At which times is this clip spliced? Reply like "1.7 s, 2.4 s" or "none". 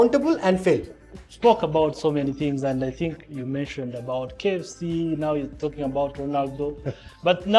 1.2 s, 3.2 s